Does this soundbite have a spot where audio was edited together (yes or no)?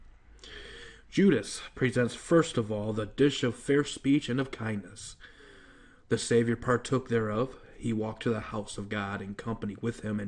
no